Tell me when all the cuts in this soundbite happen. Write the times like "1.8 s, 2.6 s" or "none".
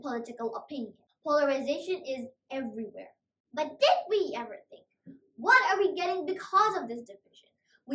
1.0 s